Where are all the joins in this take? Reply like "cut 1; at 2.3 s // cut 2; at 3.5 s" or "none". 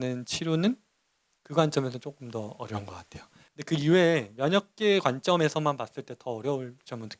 none